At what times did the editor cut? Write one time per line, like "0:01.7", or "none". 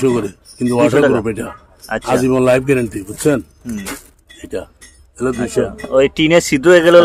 none